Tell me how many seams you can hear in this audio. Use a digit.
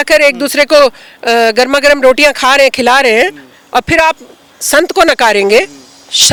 0